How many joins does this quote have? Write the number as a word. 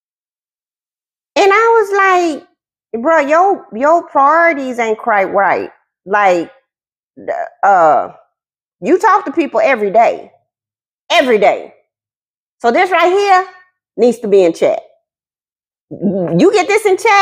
zero